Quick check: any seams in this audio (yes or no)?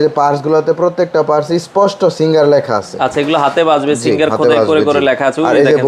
no